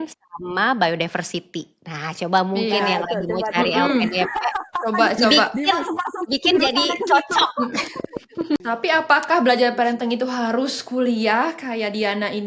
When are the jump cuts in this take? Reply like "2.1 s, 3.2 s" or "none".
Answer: 8.6 s